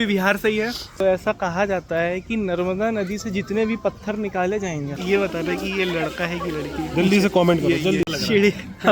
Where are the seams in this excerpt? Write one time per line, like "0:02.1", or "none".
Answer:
0:01.0
0:05.0
0:08.1